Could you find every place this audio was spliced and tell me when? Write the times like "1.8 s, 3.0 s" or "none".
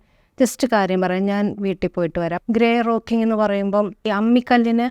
2.4 s, 4.1 s